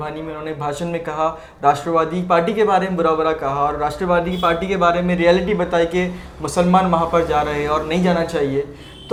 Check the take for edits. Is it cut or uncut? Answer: uncut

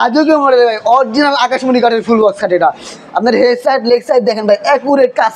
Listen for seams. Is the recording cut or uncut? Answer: uncut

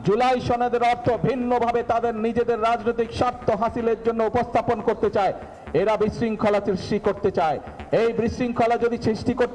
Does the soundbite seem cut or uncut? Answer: uncut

